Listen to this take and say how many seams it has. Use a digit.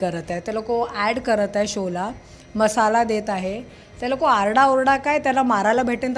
0